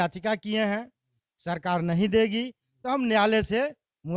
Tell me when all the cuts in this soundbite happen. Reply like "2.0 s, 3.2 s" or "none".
none